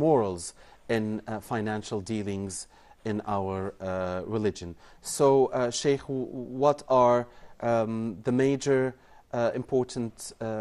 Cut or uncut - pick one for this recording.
uncut